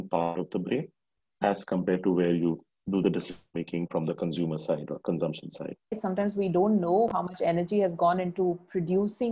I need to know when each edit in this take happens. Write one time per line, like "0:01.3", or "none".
0:06.0